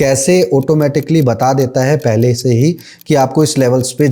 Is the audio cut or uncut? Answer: uncut